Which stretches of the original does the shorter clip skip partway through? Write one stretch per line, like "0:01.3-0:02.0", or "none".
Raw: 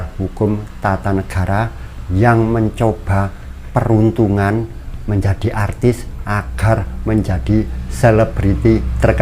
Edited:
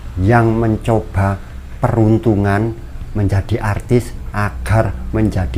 none